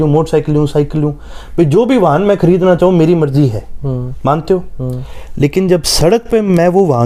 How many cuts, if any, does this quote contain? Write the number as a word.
zero